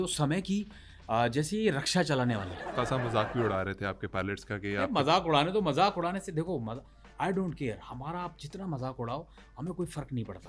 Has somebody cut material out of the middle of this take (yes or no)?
yes